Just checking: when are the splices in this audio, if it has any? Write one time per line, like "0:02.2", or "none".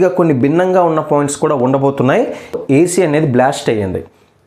0:02.6